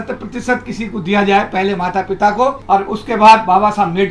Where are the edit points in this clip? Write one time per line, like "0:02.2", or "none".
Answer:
0:02.6